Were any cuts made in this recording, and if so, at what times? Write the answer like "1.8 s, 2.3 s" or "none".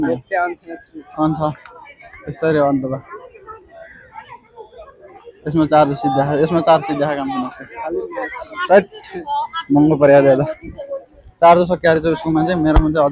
none